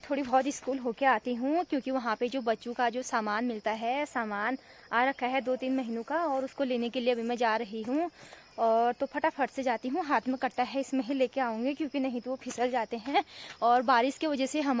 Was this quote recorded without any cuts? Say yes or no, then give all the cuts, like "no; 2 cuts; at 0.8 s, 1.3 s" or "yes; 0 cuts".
yes; 0 cuts